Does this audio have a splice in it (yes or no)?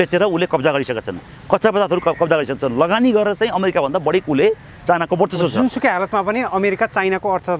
no